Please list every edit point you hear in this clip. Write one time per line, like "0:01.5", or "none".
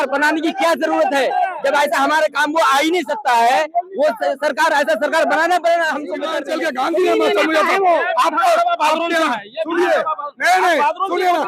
0:06.4